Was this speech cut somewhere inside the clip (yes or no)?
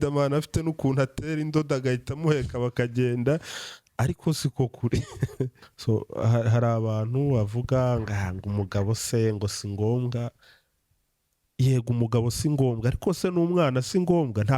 yes